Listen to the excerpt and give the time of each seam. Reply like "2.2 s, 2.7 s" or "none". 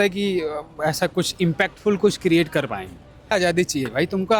3.3 s